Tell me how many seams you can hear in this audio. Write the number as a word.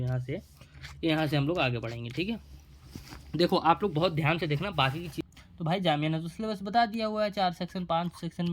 one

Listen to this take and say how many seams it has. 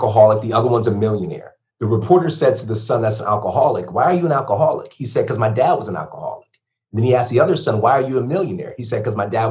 zero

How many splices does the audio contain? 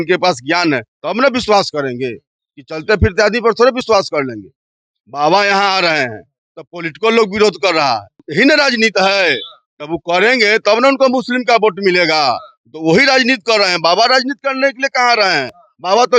one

